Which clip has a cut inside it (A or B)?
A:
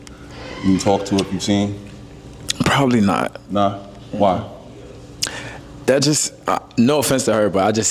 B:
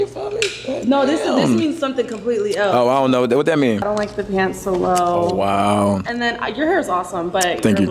B